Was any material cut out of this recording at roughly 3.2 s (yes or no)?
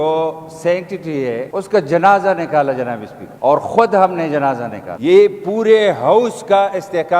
no